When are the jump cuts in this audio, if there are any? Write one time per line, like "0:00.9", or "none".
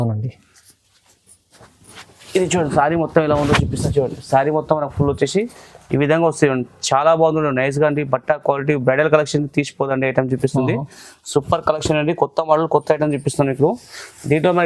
none